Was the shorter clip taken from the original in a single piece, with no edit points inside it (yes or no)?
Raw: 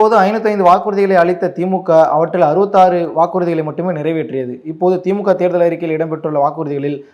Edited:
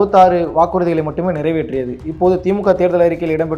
yes